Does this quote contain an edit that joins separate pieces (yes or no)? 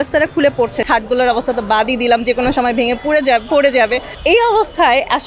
yes